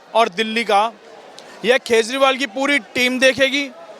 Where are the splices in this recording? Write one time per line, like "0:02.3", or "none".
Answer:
none